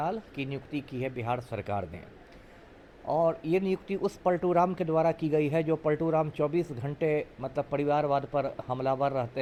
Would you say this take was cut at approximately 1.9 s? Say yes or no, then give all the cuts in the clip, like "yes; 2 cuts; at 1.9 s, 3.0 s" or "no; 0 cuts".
no; 0 cuts